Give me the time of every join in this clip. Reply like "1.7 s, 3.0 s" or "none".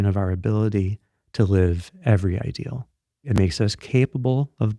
3.3 s